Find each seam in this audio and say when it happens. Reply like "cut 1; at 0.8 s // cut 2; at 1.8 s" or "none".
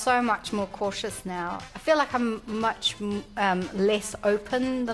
cut 1; at 1.6 s